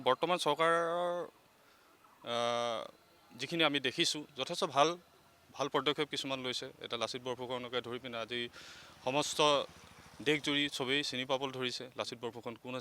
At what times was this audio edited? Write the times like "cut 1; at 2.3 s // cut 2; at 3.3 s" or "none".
none